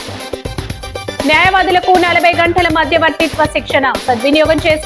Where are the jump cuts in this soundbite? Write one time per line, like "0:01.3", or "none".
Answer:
none